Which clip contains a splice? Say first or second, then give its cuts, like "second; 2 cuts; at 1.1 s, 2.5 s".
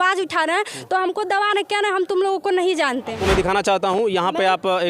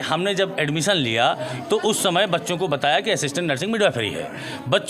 first; 1 cut; at 3.2 s